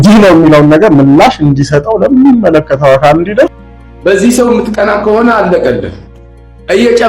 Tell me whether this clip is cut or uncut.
cut